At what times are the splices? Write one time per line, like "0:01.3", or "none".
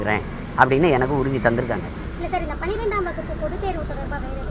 0:02.0